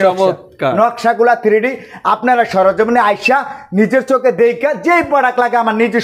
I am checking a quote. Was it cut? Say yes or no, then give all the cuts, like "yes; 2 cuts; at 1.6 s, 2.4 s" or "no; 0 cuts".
no; 0 cuts